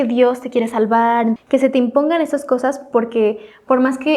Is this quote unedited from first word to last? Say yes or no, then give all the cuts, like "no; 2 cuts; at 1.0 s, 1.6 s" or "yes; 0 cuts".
no; 1 cut; at 1.4 s